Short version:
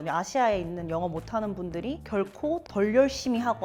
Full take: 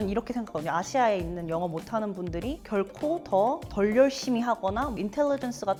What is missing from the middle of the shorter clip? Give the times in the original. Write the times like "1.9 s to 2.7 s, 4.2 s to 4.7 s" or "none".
3.2 s to 3.7 s

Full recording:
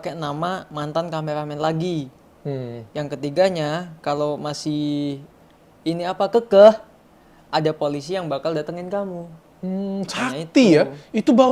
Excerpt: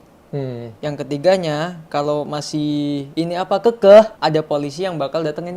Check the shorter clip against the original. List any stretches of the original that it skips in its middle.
5.2 s to 5.8 s, 6.8 s to 7.4 s

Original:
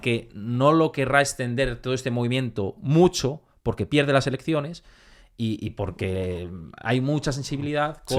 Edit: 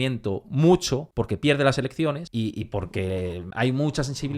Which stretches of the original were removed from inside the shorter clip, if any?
3.4 s to 3.6 s, 4.7 s to 5.3 s, 6.5 s to 6.7 s

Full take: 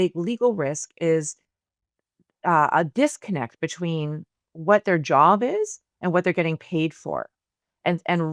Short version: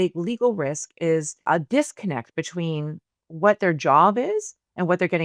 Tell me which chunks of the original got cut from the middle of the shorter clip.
1.4 s to 2.7 s

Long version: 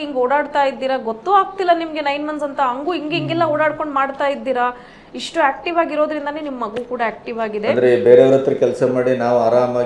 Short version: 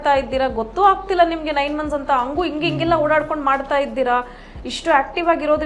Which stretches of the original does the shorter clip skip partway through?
none

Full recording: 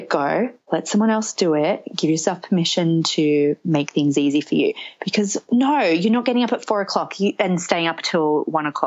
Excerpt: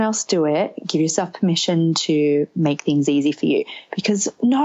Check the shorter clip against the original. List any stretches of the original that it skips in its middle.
none

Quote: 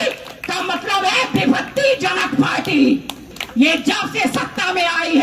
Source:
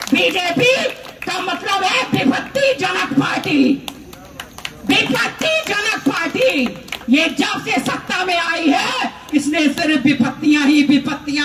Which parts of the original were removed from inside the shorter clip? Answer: 4.1 s to 6.9 s

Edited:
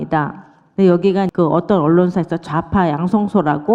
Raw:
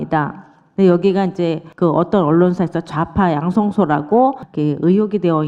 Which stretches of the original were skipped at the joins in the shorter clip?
1.3 s to 1.8 s

